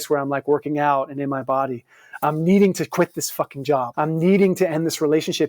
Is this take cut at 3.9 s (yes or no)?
yes